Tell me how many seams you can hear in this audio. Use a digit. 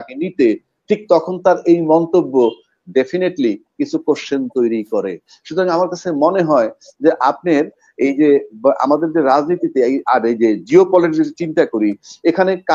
0